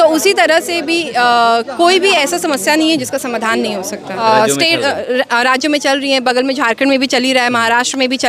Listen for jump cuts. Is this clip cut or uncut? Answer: cut